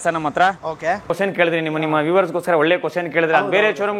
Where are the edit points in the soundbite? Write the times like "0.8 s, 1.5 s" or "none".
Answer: 1.1 s